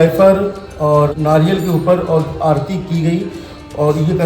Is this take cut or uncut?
cut